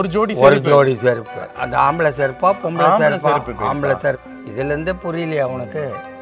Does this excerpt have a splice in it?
yes; 2 cuts; at 1.5 s, 4.3 s

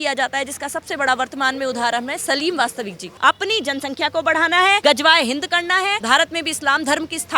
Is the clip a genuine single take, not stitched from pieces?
no; 3 cuts; at 3.1 s, 4.8 s, 6.0 s

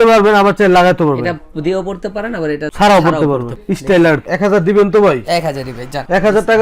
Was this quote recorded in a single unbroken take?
no; 1 cut; at 4.2 s

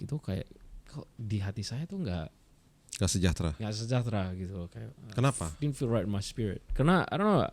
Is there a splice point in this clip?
no; 0 cuts

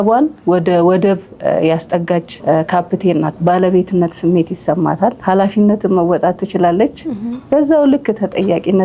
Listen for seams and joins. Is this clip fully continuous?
no; 3 cuts; at 2.3 s, 3.3 s, 5.2 s

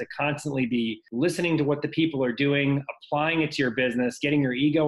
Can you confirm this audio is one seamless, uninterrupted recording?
no; 1 cut; at 1.0 s

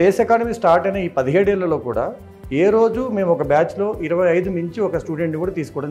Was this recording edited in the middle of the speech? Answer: no; 0 cuts

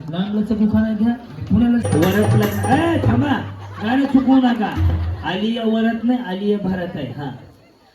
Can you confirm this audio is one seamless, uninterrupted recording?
no; 1 cut; at 1.8 s

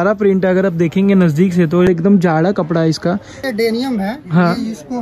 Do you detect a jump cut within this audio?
yes; 2 cuts; at 1.9 s, 3.4 s

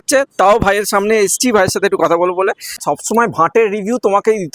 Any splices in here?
yes; 1 cut; at 2.8 s

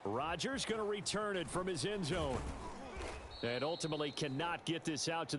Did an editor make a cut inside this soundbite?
yes; 1 cut; at 2.9 s

